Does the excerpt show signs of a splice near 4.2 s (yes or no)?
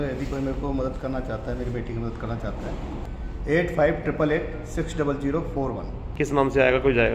no